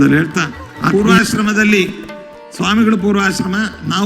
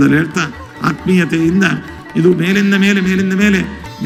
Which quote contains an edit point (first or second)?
first